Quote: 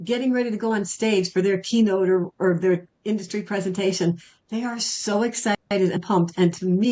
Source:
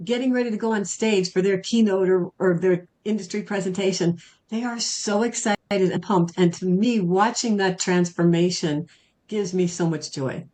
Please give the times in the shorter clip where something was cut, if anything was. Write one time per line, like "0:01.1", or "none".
none